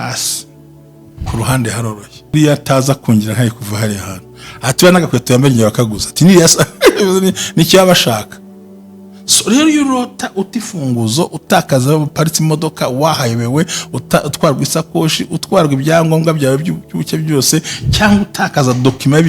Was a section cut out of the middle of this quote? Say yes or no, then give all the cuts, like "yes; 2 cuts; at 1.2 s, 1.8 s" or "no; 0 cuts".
yes; 1 cut; at 2.3 s